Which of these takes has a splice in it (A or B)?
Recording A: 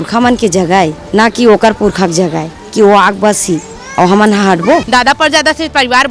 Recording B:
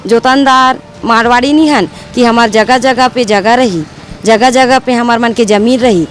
A